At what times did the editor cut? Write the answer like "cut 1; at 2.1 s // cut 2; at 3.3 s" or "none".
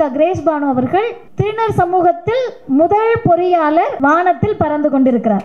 cut 1; at 1.2 s // cut 2; at 3.9 s